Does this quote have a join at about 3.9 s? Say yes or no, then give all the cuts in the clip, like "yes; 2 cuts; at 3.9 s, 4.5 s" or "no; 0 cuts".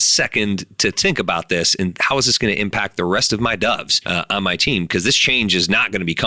yes; 1 cut; at 3.9 s